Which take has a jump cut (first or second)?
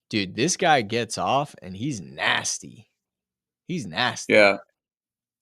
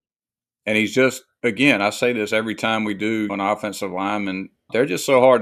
second